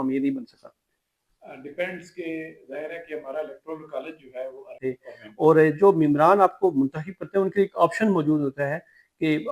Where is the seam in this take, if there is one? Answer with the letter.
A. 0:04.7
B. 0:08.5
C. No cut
A